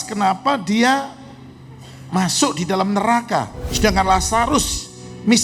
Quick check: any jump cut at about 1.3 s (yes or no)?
no